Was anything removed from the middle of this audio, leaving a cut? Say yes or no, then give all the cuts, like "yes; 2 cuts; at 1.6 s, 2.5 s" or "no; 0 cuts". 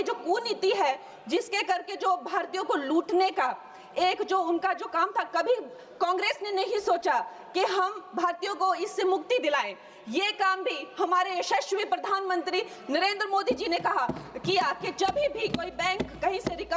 no; 0 cuts